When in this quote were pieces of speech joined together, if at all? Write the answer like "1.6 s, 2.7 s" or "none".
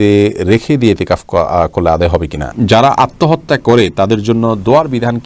2.4 s